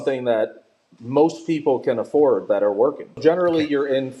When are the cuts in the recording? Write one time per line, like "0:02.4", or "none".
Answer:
0:03.2